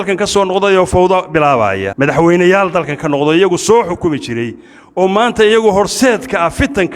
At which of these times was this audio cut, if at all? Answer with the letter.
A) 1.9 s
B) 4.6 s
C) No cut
A